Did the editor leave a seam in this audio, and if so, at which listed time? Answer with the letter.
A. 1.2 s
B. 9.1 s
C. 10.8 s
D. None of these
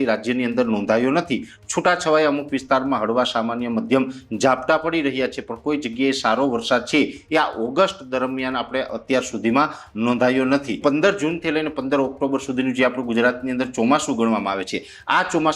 C